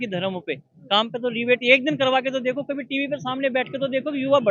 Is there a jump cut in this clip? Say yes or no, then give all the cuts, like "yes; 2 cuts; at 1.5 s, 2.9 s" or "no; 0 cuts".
no; 0 cuts